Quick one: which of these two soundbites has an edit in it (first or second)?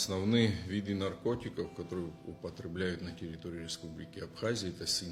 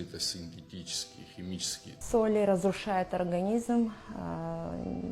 second